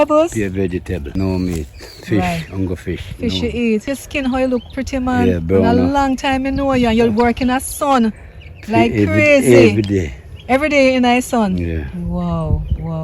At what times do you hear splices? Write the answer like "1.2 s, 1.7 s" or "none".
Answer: 1.0 s, 3.8 s